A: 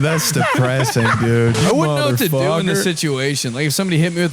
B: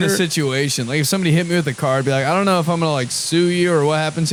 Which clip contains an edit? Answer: A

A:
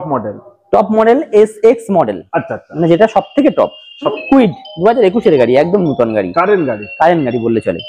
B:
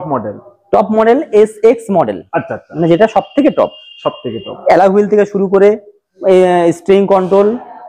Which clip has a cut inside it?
A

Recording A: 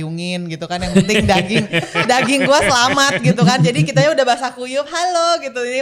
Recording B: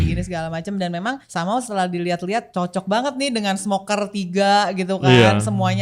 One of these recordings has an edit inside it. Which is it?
B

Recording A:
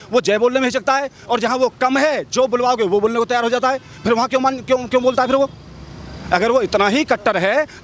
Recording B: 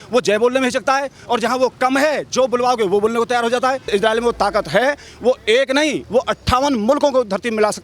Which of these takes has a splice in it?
B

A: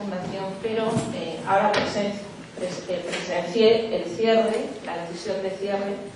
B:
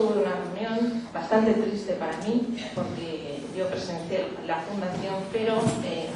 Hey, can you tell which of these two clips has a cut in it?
B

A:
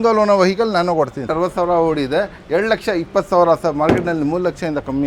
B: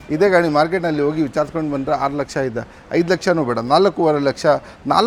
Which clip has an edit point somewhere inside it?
A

